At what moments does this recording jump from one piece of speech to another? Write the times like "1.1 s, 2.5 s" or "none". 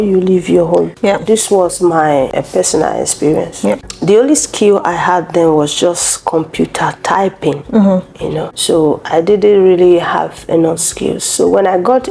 0.9 s, 2.3 s, 3.9 s, 8.5 s